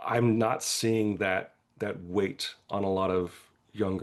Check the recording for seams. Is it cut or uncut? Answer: uncut